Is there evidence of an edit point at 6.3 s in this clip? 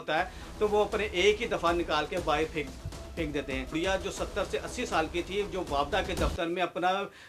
no; 1 cut; at 3.7 s

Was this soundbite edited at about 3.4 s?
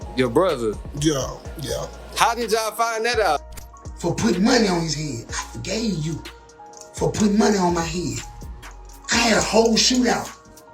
yes; 1 cut; at 3.4 s

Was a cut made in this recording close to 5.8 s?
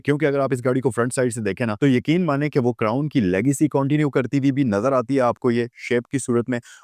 no; 1 cut; at 1.7 s

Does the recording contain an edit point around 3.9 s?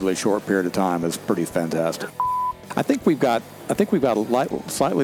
no; 1 cut; at 2.2 s

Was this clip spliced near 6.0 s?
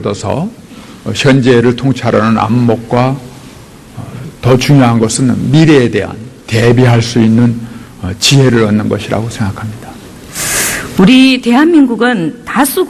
yes; 1 cut; at 6.0 s

